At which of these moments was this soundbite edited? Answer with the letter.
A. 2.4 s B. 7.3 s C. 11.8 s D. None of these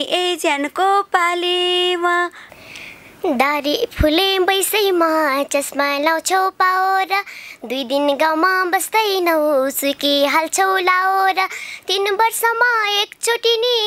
A